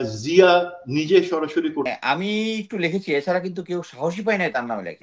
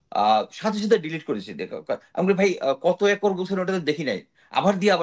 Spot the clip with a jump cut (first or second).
first